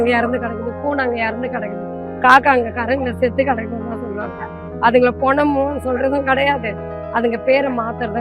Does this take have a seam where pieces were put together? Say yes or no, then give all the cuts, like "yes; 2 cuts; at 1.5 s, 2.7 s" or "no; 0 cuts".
no; 0 cuts